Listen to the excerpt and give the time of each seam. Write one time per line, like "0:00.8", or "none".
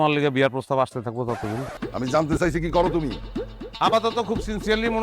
0:01.8